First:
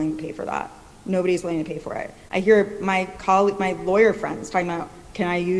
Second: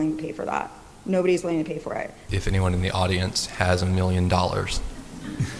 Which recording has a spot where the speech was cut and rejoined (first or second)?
second